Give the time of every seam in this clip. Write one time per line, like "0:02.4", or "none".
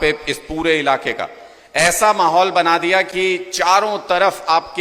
none